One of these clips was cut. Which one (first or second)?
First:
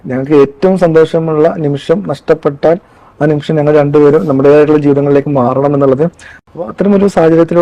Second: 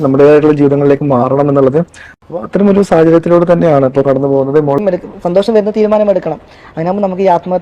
second